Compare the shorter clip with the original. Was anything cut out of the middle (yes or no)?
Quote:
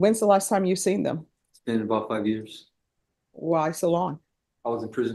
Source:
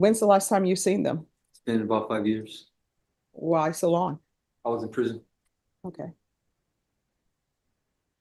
no